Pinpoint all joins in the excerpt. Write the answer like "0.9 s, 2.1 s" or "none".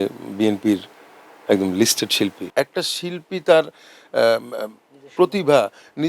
2.4 s

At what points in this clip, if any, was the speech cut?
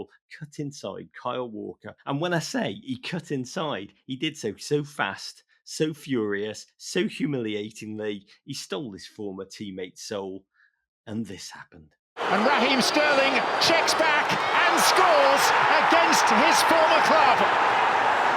1.9 s, 12.2 s

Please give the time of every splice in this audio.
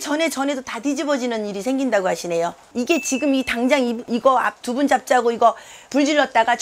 2.6 s

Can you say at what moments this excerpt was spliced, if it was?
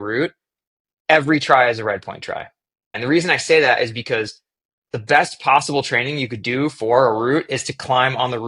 3.0 s

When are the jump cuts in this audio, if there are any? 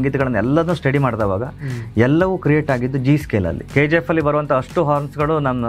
3.7 s

